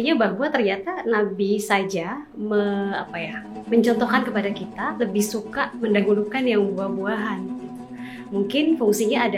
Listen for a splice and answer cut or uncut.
uncut